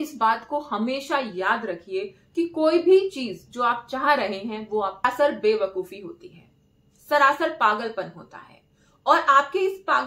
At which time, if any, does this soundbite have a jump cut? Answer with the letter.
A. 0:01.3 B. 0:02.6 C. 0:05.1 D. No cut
C